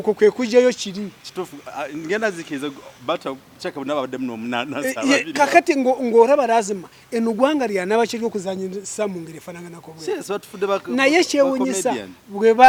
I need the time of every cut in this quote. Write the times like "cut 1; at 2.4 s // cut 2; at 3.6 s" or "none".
none